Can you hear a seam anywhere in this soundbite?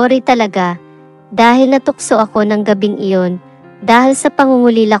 no; 0 cuts

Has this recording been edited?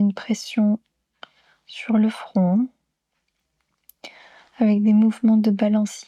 no; 0 cuts

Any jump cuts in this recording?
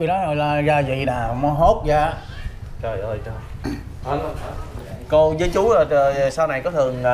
no; 0 cuts

